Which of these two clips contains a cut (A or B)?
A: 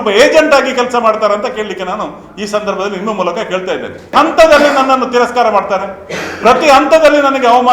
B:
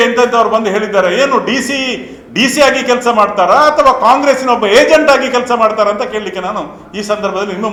A